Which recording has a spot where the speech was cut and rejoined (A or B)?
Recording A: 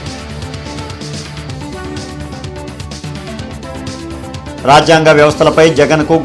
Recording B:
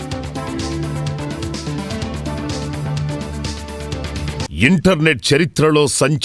B